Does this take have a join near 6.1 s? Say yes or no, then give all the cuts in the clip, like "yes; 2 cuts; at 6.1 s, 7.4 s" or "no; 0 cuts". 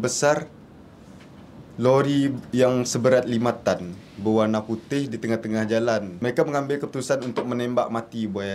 yes; 1 cut; at 6.1 s